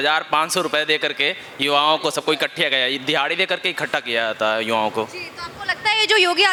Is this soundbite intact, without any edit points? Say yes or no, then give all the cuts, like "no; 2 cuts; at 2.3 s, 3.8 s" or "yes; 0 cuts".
yes; 0 cuts